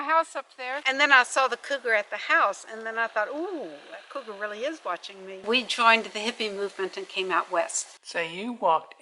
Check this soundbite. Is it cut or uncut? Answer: cut